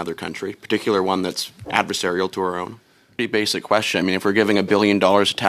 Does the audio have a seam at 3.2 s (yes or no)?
yes